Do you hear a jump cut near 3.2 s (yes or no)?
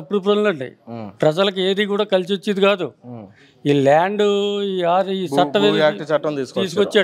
no